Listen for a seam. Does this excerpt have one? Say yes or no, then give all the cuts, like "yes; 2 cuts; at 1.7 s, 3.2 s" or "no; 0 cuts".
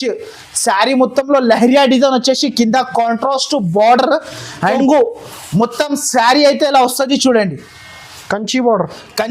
yes; 1 cut; at 4.8 s